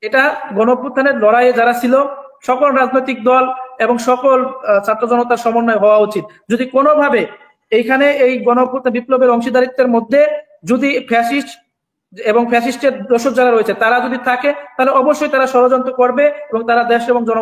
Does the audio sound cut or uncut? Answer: uncut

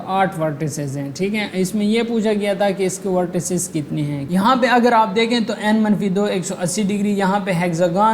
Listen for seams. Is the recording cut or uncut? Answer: cut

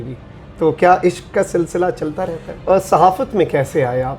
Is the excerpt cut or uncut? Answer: cut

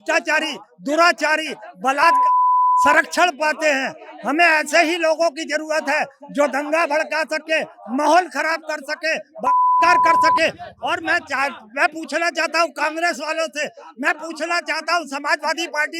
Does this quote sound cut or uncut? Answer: uncut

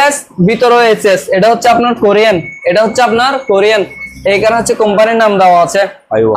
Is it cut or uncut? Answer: uncut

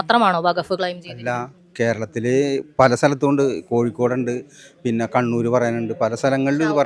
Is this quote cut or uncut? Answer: uncut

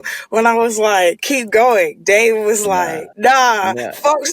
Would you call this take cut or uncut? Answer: cut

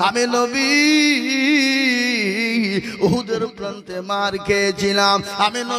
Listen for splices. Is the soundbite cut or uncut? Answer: uncut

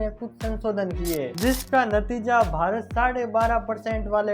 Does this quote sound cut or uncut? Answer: cut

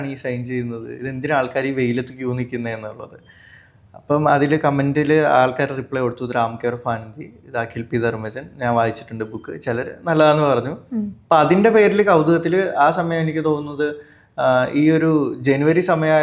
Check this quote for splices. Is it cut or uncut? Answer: uncut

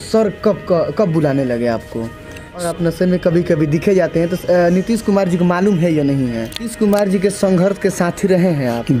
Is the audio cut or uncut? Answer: cut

